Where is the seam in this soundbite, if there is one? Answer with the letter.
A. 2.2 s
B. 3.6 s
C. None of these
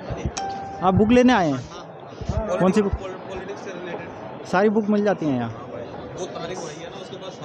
C